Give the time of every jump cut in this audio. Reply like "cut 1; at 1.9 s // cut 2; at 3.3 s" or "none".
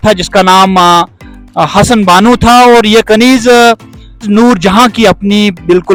none

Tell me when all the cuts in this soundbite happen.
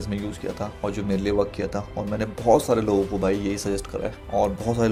none

